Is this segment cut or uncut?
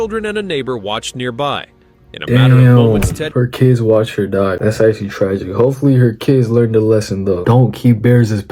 cut